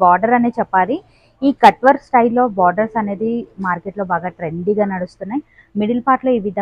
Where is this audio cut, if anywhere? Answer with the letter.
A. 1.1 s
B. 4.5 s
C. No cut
C